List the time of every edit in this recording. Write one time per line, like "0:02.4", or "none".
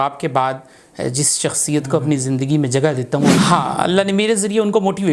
0:03.4